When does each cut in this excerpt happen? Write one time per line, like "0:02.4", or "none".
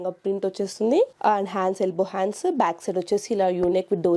none